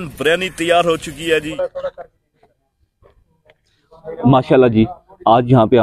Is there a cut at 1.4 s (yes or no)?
yes